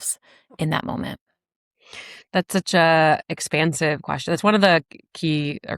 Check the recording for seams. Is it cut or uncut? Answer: uncut